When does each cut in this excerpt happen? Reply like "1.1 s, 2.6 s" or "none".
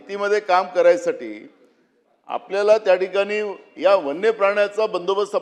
none